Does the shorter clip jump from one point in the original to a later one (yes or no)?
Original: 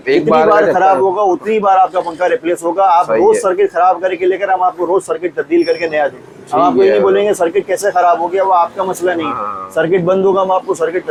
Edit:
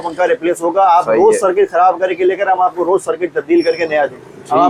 no